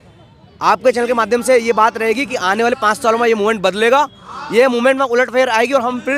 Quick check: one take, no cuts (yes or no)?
yes